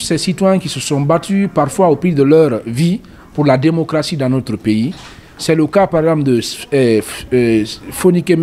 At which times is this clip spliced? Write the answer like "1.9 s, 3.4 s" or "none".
none